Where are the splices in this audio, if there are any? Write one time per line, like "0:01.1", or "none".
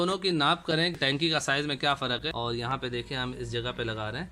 0:01.0
0:02.3